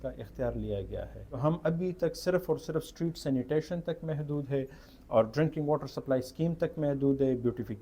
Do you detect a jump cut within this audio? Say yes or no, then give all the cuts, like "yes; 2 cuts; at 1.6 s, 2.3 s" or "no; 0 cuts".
yes; 1 cut; at 1.2 s